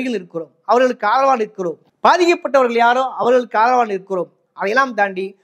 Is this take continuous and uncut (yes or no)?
yes